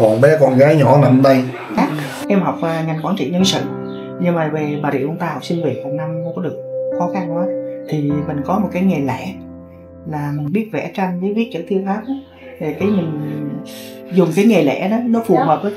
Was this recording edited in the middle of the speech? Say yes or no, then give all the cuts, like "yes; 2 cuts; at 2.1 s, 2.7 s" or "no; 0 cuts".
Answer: yes; 1 cut; at 1.8 s